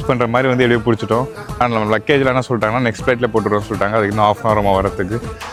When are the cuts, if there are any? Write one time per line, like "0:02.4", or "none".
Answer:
none